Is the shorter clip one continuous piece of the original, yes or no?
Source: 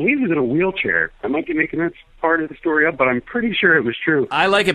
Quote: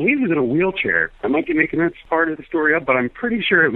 no